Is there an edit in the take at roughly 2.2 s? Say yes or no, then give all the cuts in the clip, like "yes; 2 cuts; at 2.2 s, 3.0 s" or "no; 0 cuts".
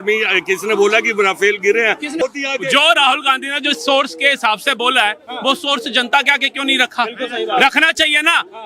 yes; 1 cut; at 2.2 s